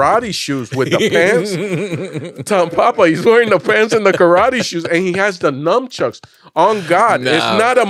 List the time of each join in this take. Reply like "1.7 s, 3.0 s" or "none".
none